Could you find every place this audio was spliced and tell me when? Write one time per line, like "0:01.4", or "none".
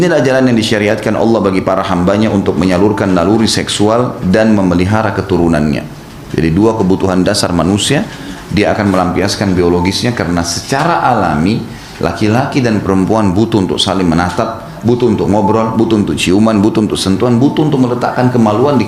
none